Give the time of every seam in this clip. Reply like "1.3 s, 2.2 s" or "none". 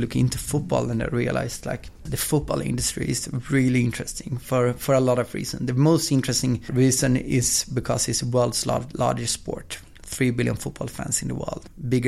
none